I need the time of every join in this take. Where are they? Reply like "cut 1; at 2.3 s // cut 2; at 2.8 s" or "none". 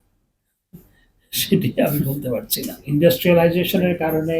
cut 1; at 2.8 s